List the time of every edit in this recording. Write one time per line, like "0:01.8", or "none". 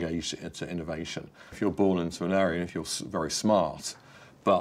0:01.5